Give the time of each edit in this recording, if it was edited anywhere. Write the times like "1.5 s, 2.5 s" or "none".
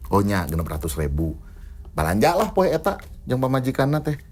none